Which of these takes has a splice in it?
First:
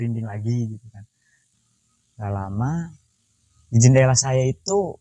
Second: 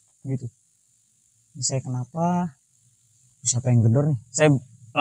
first; 1 cut; at 1.4 s

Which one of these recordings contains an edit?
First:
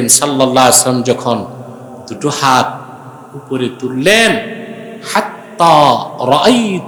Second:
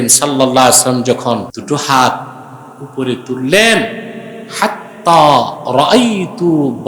second; 1 cut; at 1.5 s

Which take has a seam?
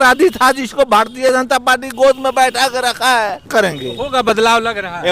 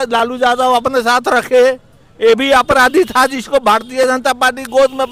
first; 1 cut; at 3.5 s

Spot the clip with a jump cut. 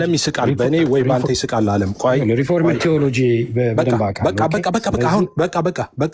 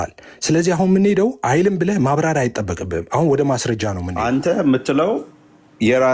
second; 1 cut; at 4.0 s

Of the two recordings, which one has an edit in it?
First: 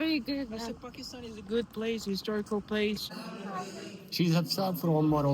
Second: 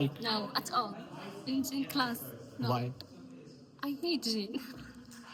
first; 1 cut; at 3.0 s

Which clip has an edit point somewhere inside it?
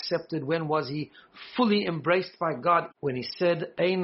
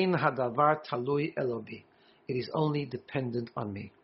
first; 1 cut; at 2.9 s

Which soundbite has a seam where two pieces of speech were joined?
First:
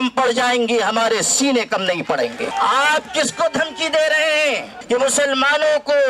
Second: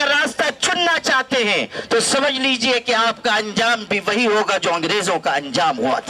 first; 2 cuts; at 2.5 s, 4.7 s

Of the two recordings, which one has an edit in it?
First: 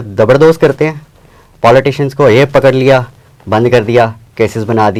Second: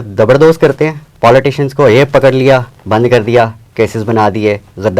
second; 2 cuts; at 1.0 s, 2.7 s

